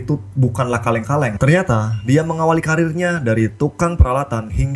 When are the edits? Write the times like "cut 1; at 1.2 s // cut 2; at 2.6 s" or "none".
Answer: cut 1; at 1.3 s